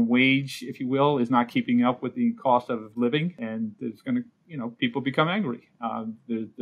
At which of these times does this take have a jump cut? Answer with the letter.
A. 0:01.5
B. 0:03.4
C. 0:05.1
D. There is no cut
B